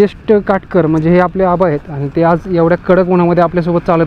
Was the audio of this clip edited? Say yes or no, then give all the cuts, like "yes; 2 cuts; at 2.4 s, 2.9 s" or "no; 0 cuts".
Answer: no; 0 cuts